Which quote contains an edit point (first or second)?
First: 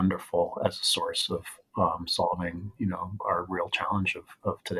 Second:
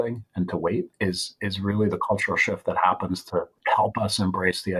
second